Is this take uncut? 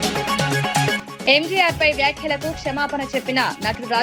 yes; 0 cuts

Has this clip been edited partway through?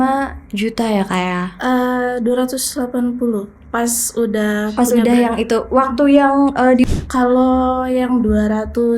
yes; 1 cut; at 6.9 s

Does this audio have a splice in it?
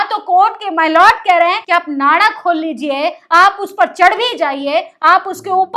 yes; 1 cut; at 1.6 s

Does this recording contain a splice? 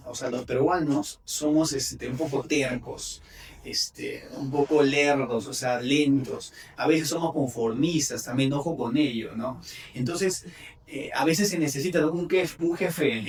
no; 0 cuts

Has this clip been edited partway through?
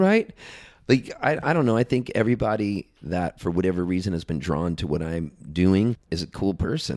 yes; 1 cut; at 6.0 s

